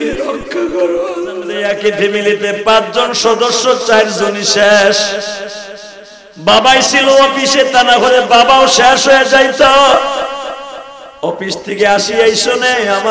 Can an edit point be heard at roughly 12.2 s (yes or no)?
no